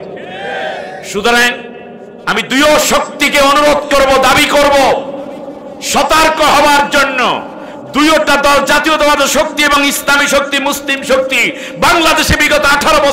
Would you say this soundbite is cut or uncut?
uncut